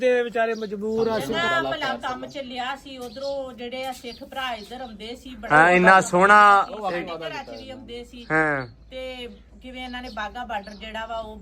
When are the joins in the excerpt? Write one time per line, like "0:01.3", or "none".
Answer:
0:01.2

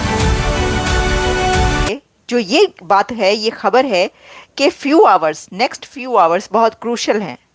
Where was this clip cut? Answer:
0:01.9

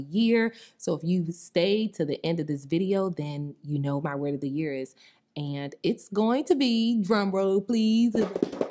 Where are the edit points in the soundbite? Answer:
none

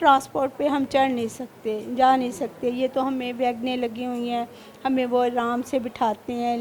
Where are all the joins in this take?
none

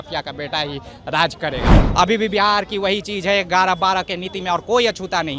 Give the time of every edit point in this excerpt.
0:01.8

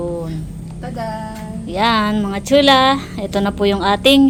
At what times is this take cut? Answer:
none

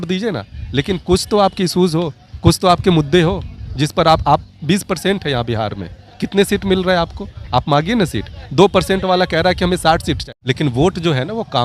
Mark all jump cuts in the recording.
0:02.2
0:10.3

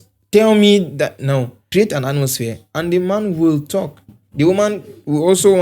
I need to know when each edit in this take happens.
0:01.6

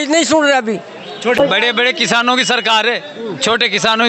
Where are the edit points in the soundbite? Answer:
0:01.4

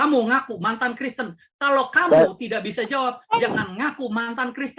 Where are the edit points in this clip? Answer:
none

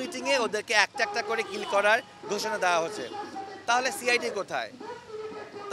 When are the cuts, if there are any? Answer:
none

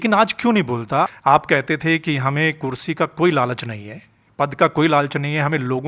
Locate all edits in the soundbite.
0:01.1

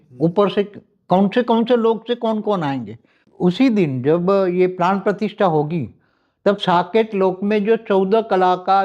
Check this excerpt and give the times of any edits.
0:03.1

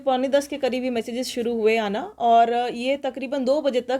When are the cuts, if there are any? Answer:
none

